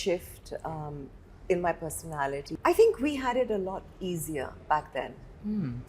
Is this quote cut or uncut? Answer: cut